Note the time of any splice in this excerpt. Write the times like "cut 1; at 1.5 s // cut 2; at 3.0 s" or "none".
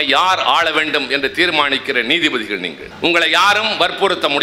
cut 1; at 2.8 s